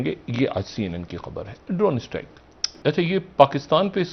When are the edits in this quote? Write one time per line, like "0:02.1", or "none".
0:02.7